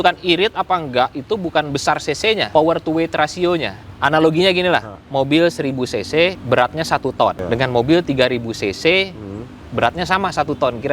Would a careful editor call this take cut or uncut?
cut